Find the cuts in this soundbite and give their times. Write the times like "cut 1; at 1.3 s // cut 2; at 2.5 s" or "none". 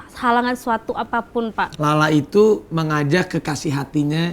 cut 1; at 1.7 s